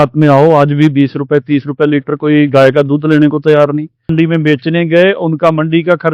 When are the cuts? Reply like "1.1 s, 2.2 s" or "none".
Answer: 4.1 s